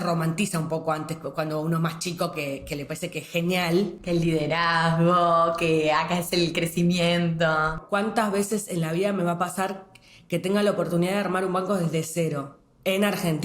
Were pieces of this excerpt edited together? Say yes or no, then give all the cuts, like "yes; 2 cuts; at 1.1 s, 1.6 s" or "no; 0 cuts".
yes; 1 cut; at 7.8 s